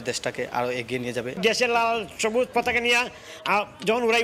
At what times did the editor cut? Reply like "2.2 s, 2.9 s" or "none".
1.3 s